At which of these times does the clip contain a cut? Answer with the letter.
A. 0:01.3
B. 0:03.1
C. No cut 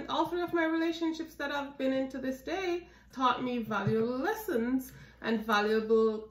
B